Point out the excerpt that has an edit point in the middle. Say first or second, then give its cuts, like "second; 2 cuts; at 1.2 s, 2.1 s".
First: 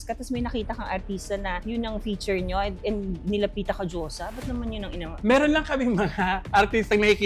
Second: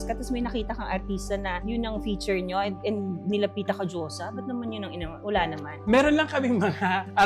first; 1 cut; at 5.1 s